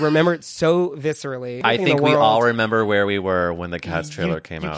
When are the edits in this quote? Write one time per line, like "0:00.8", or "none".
0:01.6